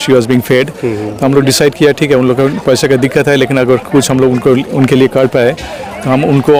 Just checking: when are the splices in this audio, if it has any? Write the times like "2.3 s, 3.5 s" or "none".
none